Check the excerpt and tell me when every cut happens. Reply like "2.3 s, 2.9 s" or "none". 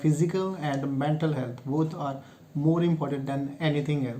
none